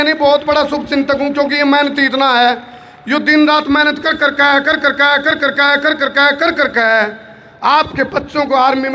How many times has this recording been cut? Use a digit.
0